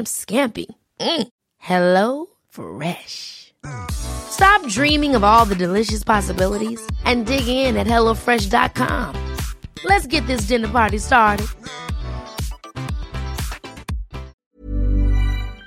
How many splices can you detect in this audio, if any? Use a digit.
1